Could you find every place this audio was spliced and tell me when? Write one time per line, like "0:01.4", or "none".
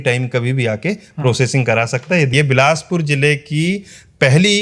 0:02.3